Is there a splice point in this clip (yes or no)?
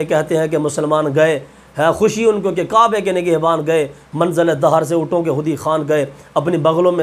no